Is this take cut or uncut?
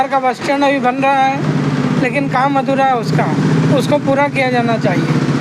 uncut